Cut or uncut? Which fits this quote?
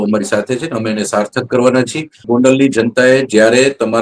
cut